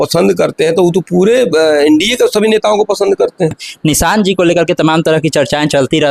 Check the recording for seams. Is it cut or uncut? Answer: cut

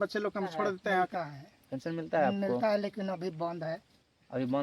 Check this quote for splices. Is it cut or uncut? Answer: cut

